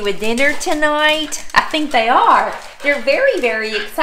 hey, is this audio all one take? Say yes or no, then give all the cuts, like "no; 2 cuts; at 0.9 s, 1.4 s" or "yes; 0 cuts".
yes; 0 cuts